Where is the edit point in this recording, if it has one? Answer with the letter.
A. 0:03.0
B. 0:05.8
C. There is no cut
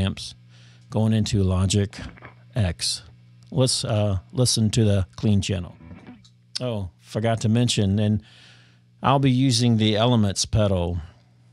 B